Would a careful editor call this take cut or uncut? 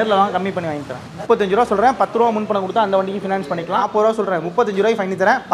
cut